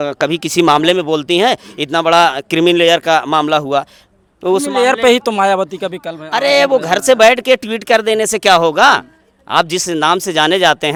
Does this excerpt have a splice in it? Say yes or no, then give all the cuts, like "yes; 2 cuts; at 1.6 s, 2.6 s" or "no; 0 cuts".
no; 0 cuts